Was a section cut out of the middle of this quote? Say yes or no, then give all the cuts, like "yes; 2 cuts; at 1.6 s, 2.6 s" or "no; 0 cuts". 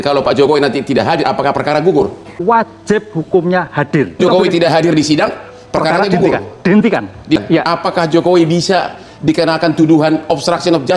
yes; 3 cuts; at 2.4 s, 4.2 s, 7.4 s